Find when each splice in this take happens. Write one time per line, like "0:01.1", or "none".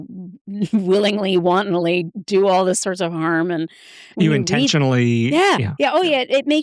none